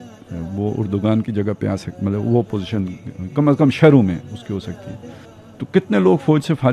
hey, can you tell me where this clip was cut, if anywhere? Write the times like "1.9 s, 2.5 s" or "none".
5.0 s